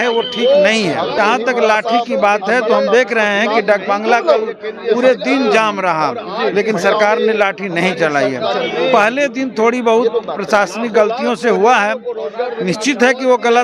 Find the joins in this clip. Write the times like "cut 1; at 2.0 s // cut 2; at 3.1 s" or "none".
cut 1; at 1.2 s